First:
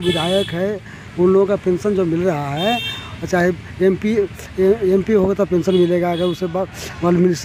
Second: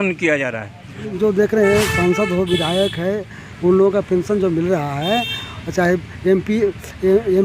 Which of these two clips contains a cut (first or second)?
second